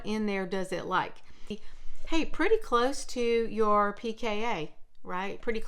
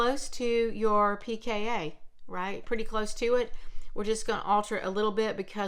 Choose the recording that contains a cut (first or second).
first